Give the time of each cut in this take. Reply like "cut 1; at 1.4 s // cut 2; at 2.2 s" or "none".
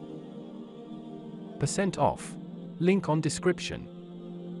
none